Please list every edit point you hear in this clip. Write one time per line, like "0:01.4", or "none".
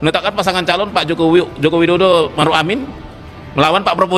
none